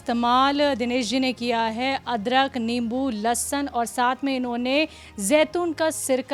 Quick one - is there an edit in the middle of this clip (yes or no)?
no